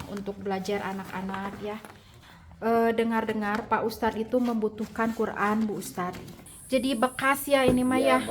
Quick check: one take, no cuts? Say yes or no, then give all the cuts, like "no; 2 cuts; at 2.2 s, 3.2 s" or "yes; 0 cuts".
no; 2 cuts; at 2.1 s, 6.5 s